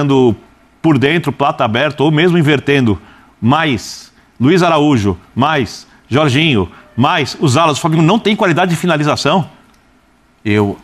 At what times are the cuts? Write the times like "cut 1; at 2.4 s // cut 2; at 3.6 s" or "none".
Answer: none